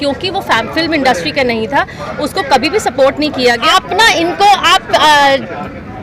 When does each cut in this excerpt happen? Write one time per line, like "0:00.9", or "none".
0:03.6

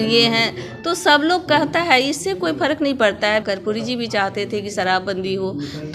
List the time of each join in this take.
0:03.4

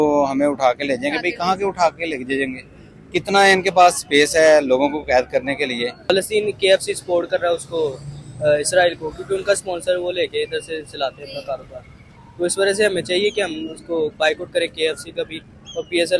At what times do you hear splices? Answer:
0:06.1

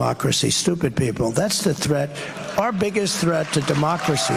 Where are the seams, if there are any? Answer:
none

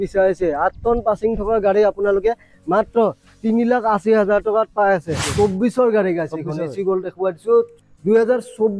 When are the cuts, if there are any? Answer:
0:05.3
0:07.8

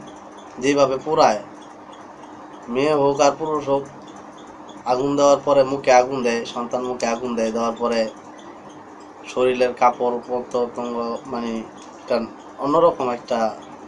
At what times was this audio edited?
none

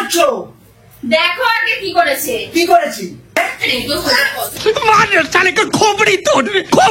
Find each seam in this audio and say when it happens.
0:03.4

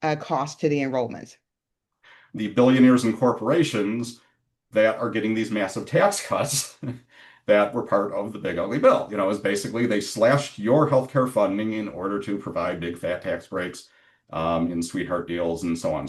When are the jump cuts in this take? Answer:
0:02.2

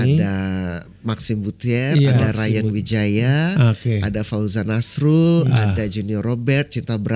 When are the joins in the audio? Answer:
none

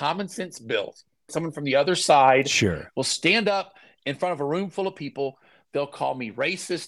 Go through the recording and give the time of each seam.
0:01.3

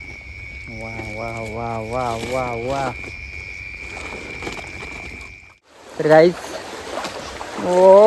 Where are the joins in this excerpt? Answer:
0:05.7

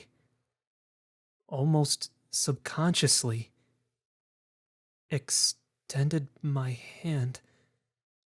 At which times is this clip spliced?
none

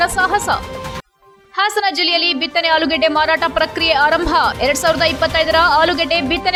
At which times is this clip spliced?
none

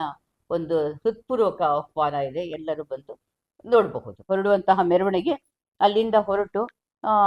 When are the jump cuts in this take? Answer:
0:04.3

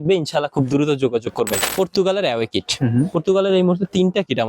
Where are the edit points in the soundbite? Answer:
0:01.6

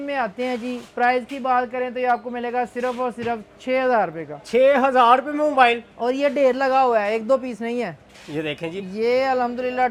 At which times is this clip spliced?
none

